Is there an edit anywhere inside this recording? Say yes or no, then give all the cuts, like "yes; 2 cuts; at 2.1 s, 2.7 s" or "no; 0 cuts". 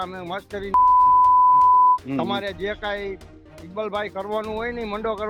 no; 0 cuts